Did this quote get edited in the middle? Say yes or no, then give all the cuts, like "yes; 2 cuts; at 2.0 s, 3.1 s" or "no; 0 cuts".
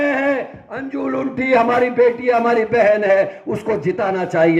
no; 0 cuts